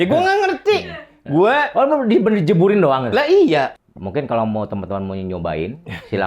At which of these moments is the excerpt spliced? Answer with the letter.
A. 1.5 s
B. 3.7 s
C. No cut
B